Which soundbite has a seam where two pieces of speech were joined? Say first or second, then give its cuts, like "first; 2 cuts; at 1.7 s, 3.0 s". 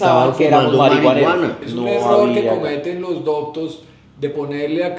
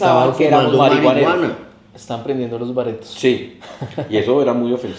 first; 1 cut; at 1.6 s